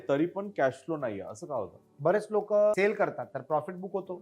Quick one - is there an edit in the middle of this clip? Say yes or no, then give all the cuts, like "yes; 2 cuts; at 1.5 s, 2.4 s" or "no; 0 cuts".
yes; 2 cuts; at 1.8 s, 2.8 s